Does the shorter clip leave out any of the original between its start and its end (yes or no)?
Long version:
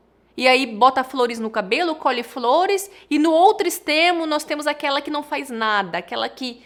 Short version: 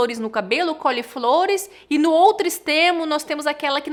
no